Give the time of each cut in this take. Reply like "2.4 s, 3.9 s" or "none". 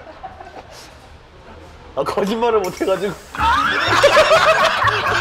none